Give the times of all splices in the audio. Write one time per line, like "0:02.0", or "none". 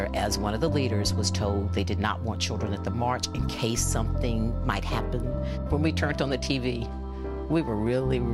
0:01.5

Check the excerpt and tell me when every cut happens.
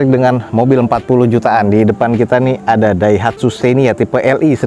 none

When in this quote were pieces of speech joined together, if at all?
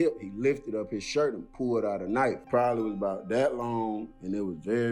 0:02.4

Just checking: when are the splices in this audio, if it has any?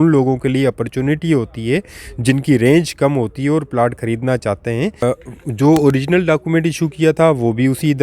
0:05.0

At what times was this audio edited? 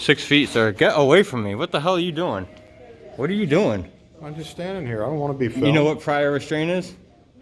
none

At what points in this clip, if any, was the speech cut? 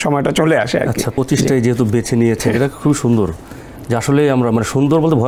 none

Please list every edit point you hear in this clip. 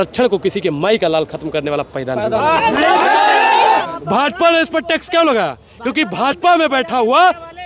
0:03.8

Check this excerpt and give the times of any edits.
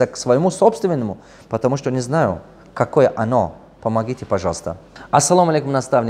0:04.9

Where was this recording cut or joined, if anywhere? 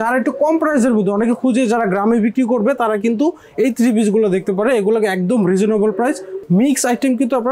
0:06.3

